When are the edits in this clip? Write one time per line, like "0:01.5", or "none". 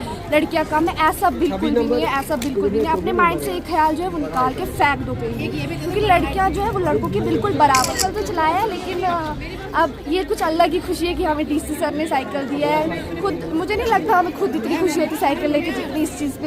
0:08.0